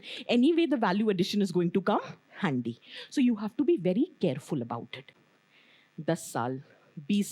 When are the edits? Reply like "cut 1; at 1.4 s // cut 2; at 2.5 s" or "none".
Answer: cut 1; at 5.2 s

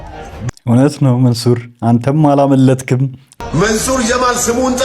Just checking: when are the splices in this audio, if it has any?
cut 1; at 3.2 s

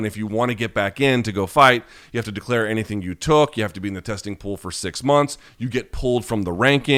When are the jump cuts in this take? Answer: none

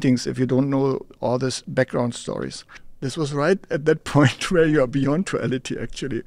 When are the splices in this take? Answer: cut 1; at 2.8 s

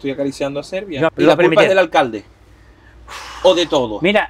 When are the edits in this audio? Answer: cut 1; at 1.1 s

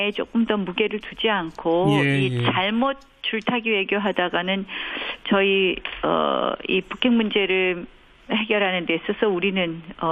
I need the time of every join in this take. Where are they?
none

